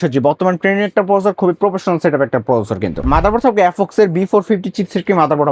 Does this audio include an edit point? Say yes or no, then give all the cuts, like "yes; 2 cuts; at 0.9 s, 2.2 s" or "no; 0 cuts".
yes; 1 cut; at 3.1 s